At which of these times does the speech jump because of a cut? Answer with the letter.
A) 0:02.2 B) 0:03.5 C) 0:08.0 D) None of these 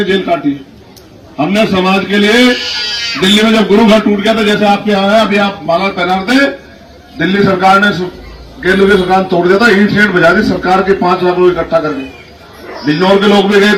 D